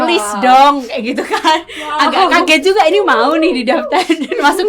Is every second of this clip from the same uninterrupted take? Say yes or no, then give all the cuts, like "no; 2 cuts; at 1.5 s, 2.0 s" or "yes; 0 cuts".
yes; 0 cuts